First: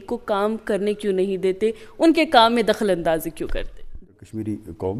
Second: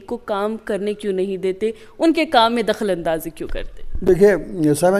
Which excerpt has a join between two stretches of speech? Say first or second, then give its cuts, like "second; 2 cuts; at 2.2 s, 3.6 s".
first; 1 cut; at 4.0 s